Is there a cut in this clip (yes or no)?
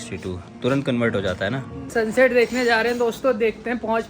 yes